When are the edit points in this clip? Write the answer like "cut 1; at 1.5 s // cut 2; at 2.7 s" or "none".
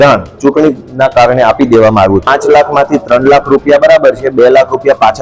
cut 1; at 2.3 s